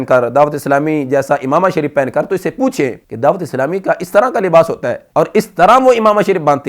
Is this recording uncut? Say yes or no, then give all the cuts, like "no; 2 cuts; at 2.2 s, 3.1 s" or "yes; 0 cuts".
yes; 0 cuts